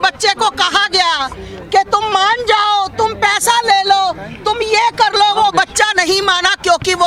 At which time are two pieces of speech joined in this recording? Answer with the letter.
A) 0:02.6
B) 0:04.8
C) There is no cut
C